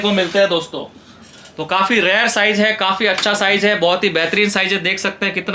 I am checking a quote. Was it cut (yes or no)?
no